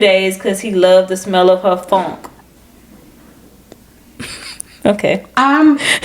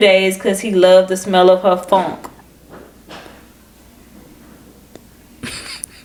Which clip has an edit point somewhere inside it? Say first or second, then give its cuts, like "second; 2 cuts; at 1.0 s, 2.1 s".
first; 1 cut; at 2.6 s